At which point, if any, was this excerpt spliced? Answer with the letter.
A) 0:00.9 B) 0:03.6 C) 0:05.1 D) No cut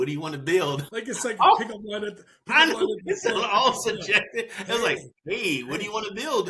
A